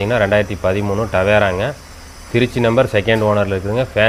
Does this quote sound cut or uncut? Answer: uncut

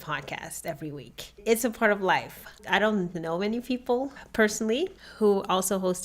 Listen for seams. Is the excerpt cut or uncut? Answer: cut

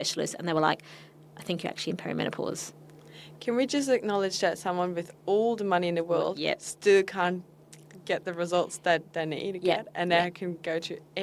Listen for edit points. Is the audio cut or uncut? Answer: uncut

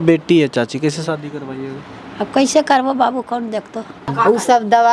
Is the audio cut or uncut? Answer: cut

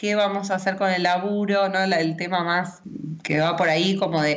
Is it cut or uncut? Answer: uncut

